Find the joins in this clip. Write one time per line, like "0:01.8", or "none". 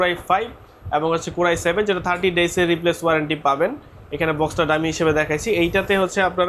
none